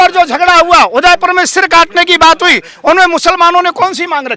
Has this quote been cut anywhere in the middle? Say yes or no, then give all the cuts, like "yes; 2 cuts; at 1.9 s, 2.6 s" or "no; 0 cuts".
no; 0 cuts